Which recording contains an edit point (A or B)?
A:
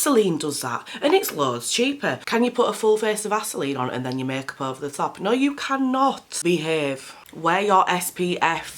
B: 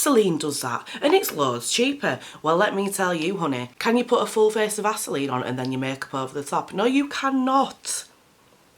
A